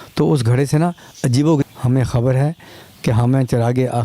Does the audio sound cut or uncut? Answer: cut